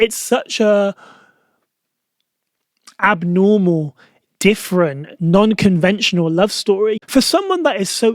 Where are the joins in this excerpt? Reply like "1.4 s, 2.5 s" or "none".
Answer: 7.0 s